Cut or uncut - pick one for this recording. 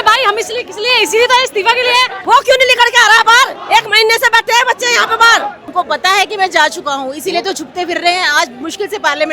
cut